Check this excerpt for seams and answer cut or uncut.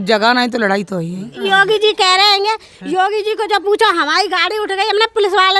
cut